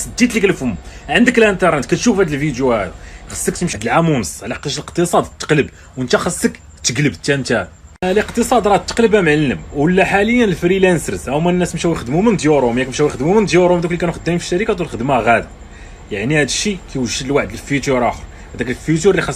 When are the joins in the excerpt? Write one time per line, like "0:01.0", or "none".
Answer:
0:03.8

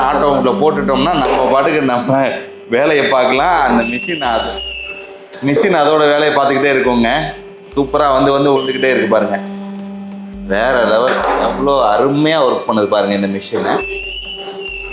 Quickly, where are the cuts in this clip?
none

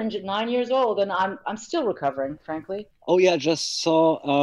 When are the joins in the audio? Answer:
0:02.8

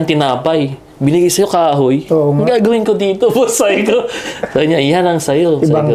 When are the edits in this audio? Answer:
none

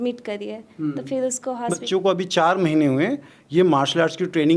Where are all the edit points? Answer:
0:01.8

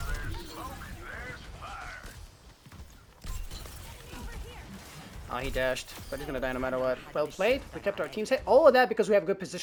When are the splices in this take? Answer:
none

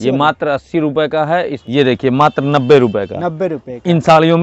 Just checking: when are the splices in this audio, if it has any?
0:01.6

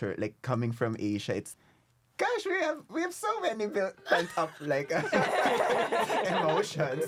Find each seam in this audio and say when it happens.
none

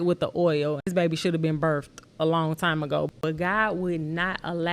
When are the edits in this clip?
0:00.9
0:03.1

